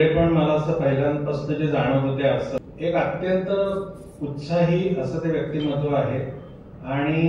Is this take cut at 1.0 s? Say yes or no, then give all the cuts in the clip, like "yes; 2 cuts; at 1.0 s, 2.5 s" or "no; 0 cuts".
no; 1 cut; at 2.6 s